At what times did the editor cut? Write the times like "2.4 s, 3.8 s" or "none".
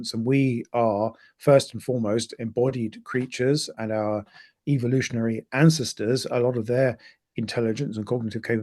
3.7 s